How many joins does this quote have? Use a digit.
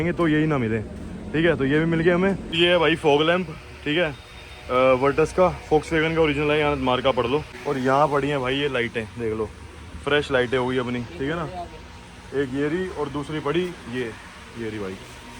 2